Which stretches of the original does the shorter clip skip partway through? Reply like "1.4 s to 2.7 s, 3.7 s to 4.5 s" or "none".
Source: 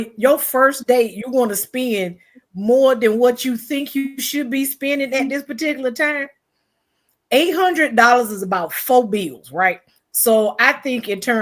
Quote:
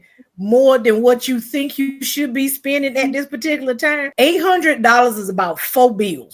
6.2 s to 7.2 s